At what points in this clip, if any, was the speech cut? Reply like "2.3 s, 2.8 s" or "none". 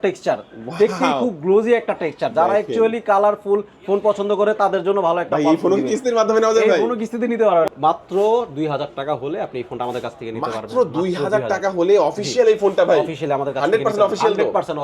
7.7 s

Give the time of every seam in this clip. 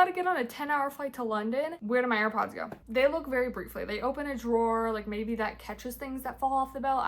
none

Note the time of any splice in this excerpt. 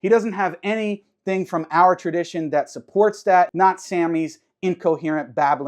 3.5 s

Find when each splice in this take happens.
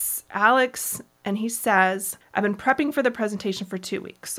2.1 s

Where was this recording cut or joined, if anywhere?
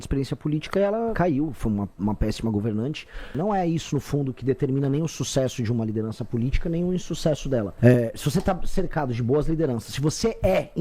1.1 s, 3.3 s, 7.7 s

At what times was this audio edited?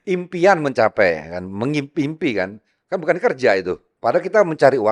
3.9 s

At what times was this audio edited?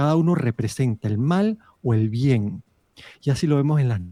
none

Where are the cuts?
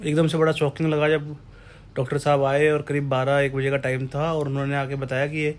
none

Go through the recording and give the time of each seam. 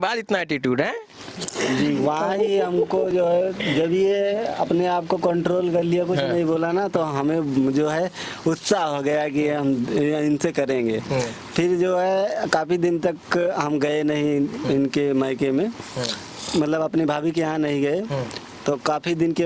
none

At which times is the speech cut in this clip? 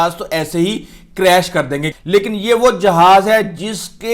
1.9 s

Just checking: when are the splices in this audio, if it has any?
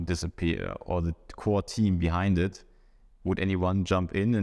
none

